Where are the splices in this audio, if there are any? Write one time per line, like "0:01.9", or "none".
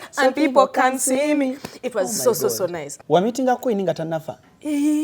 0:02.9